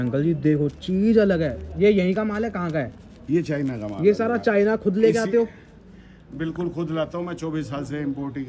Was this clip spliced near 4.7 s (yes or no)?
no